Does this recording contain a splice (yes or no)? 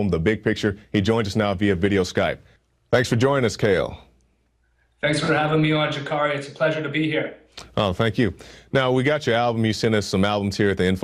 yes